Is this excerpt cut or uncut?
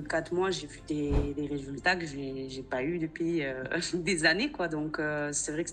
uncut